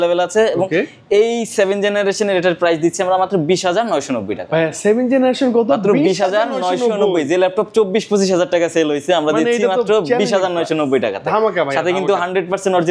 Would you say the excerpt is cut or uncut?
uncut